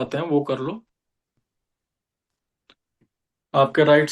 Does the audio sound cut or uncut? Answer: cut